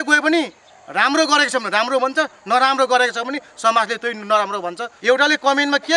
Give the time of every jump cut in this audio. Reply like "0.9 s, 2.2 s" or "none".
4.9 s